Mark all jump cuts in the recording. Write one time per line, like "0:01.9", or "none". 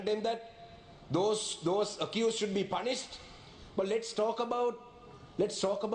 none